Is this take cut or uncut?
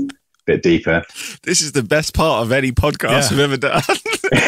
cut